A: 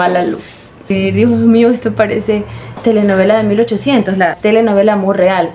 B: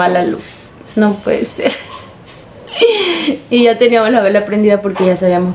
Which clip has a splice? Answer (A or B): A